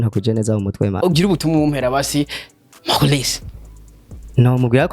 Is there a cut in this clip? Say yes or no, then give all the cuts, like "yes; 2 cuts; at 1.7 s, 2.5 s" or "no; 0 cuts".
yes; 1 cut; at 1.0 s